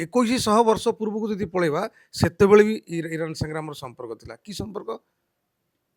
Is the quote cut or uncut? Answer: uncut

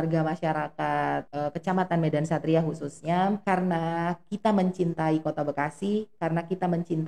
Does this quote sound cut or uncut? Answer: cut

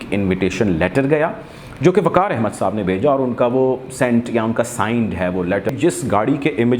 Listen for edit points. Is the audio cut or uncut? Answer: cut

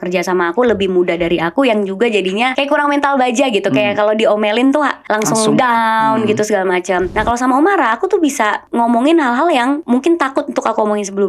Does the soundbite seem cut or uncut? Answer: cut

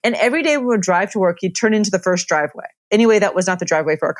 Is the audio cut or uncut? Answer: cut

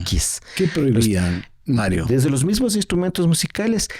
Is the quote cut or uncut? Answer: uncut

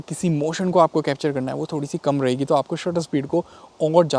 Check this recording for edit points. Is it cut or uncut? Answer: uncut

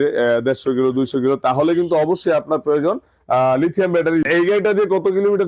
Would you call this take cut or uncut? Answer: cut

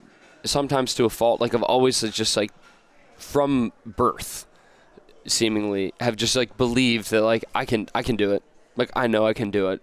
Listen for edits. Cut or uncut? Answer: uncut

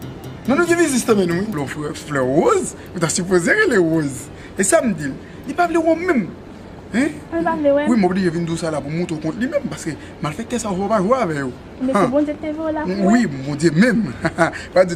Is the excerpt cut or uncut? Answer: uncut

